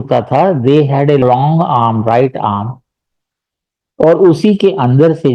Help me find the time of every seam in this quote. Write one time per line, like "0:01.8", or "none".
0:01.2